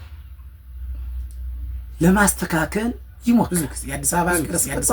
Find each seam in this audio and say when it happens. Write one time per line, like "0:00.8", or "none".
0:03.5